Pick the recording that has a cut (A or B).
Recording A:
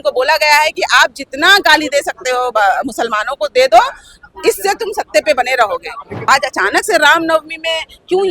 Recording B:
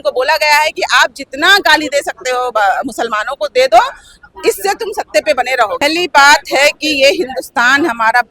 A